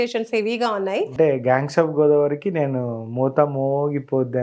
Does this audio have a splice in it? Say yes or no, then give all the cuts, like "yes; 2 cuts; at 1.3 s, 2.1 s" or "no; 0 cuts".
yes; 1 cut; at 1.1 s